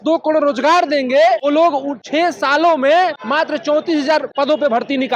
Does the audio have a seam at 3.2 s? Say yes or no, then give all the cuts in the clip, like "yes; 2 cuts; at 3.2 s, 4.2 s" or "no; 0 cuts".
yes; 3 cuts; at 1.7 s, 3.2 s, 4.3 s